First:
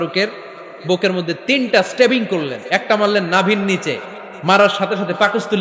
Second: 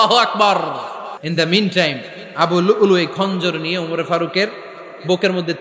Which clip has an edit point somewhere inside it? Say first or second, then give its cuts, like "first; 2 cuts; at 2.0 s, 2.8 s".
second; 1 cut; at 1.2 s